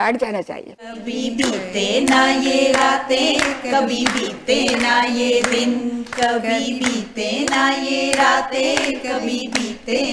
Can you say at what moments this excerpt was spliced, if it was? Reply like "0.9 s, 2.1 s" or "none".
1.0 s